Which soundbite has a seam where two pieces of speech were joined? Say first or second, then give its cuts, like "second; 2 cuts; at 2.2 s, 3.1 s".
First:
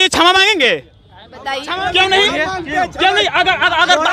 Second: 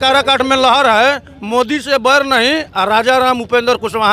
first; 1 cut; at 1.8 s